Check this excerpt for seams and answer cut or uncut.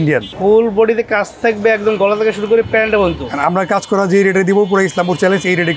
uncut